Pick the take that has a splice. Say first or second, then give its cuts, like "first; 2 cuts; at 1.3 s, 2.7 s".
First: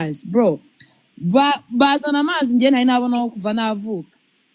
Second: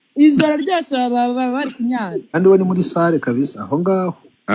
second; 1 cut; at 2.4 s